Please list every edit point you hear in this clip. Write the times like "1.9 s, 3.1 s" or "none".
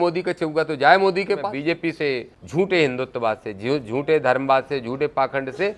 1.9 s